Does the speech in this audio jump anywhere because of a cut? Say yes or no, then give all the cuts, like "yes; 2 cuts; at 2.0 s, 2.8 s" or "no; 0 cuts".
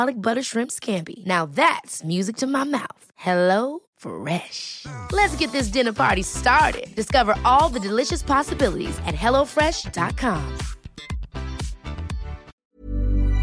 yes; 1 cut; at 12.5 s